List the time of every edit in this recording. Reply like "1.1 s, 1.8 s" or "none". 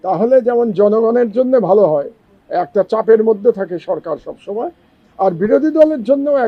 none